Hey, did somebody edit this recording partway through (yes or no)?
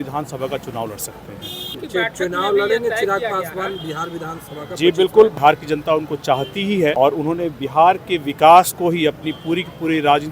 yes